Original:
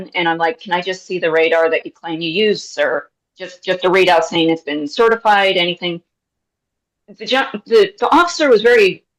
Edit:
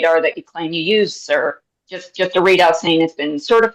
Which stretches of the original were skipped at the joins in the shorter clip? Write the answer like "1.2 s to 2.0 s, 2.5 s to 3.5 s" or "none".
none